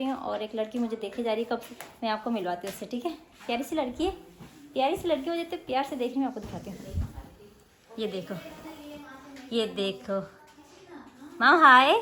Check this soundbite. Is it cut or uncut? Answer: uncut